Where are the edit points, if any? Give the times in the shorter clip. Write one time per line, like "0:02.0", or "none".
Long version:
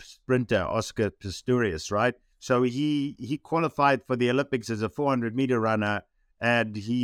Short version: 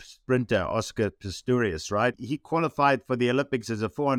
0:02.2